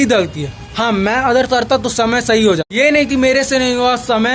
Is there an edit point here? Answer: yes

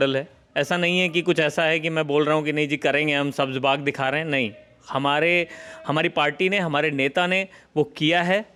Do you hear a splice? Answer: no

